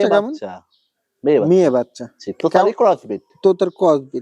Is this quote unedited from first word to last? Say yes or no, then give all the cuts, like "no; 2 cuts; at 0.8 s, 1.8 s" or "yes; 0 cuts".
yes; 0 cuts